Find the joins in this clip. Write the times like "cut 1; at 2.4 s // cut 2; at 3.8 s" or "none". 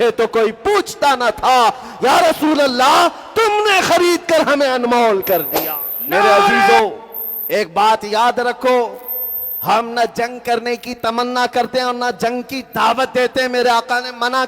cut 1; at 6.7 s